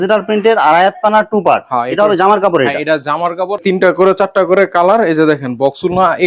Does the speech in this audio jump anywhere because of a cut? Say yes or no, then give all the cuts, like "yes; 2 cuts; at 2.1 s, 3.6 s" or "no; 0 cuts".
yes; 1 cut; at 3.5 s